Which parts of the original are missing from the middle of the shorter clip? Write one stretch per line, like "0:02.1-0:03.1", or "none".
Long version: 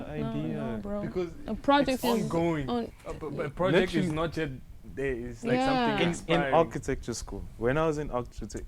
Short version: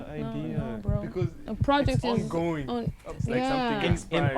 0:03.1-0:05.3